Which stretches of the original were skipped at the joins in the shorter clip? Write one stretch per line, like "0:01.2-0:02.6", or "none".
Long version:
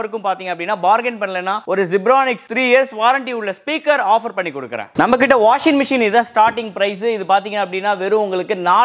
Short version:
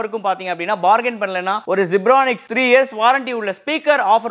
none